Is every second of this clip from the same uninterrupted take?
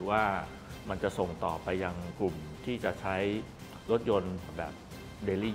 no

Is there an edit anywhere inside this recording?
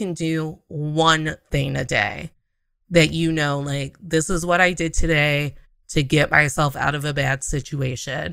no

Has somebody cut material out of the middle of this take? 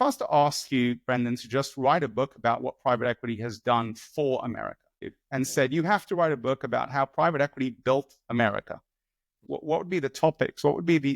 yes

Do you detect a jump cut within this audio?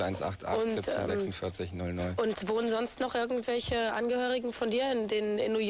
no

